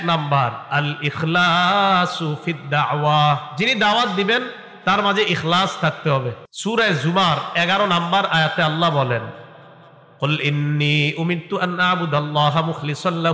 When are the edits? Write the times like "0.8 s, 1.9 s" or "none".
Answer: 6.4 s